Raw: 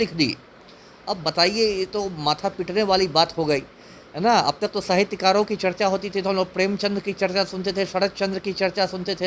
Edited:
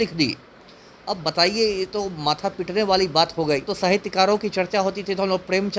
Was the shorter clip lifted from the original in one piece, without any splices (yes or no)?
no